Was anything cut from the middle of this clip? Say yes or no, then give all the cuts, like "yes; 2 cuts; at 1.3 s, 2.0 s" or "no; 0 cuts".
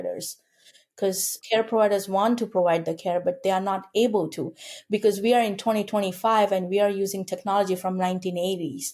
no; 0 cuts